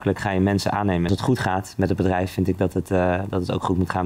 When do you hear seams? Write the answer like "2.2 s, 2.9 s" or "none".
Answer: 1.1 s